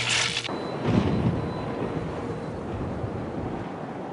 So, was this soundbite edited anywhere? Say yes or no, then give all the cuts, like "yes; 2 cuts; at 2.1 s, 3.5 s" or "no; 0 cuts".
yes; 1 cut; at 2.8 s